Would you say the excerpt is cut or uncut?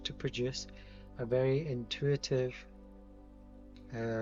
uncut